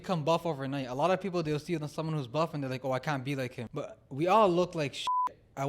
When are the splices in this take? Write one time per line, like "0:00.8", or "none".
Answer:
0:03.6